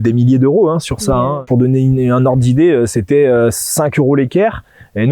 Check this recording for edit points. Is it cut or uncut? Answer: cut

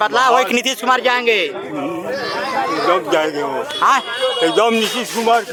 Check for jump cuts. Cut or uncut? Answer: uncut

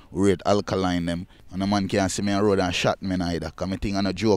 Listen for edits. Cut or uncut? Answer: cut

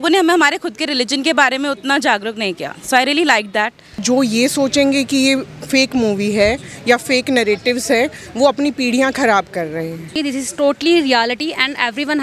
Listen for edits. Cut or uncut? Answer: cut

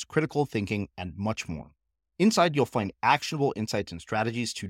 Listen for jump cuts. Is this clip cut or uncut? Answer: uncut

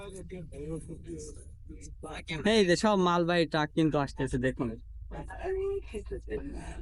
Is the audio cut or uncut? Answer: uncut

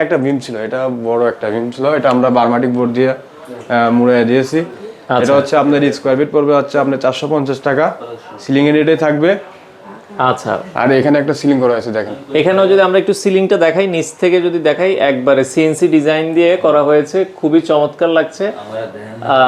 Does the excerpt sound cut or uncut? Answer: uncut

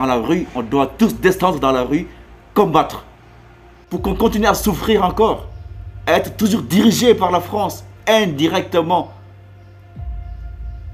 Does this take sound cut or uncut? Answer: cut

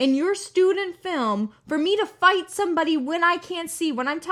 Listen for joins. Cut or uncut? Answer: uncut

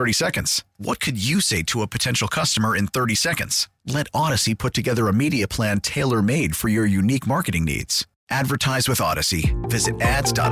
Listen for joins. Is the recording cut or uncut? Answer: uncut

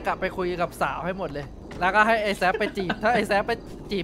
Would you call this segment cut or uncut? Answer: cut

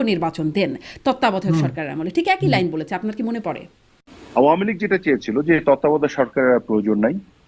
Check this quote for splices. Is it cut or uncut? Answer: cut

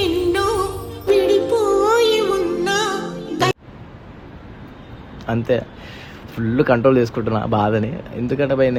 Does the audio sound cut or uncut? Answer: uncut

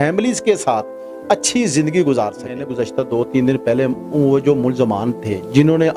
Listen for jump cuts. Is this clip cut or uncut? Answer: cut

